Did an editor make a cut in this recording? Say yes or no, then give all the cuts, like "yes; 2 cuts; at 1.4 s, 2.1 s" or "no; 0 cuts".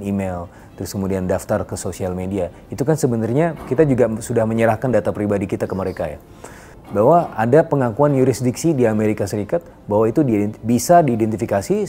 yes; 1 cut; at 6.7 s